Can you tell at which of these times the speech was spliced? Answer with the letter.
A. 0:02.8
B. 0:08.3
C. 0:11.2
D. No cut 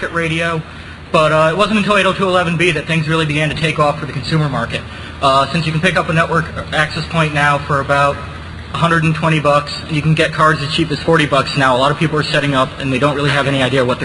D